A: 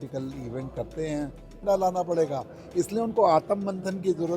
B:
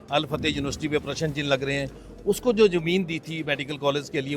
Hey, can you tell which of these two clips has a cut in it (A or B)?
A